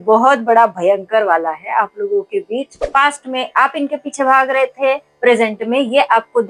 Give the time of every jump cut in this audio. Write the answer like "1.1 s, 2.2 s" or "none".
2.8 s